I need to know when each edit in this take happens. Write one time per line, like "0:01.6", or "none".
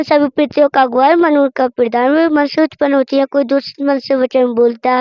none